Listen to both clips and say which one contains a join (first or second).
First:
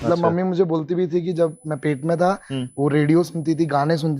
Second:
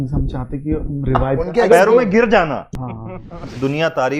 second